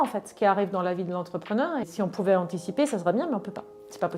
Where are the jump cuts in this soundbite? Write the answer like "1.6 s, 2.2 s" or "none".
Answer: 1.8 s